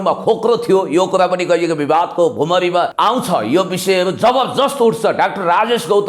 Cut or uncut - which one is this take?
cut